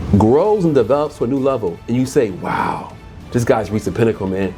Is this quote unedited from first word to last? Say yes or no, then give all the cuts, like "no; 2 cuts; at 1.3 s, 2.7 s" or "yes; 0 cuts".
yes; 0 cuts